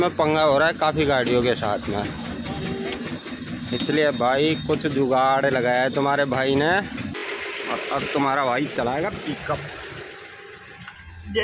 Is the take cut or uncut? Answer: cut